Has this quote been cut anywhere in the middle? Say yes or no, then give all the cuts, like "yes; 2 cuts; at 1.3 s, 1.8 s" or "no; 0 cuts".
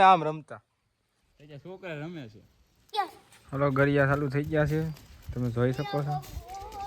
yes; 1 cut; at 2.9 s